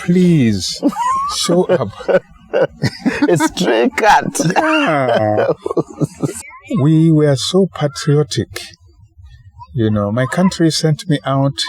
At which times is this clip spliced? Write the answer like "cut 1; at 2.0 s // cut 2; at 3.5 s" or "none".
cut 1; at 6.4 s